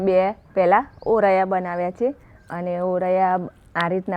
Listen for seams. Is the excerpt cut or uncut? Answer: uncut